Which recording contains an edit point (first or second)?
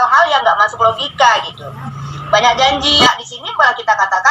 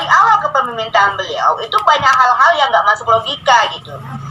first